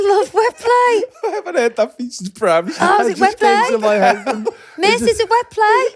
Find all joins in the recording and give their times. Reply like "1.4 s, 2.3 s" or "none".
none